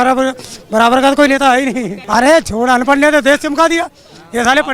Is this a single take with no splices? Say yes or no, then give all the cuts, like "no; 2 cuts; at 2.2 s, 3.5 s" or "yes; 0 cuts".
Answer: no; 1 cut; at 2.0 s